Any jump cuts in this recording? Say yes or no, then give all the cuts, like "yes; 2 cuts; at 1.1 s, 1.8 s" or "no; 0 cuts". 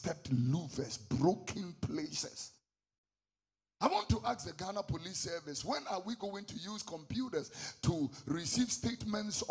no; 0 cuts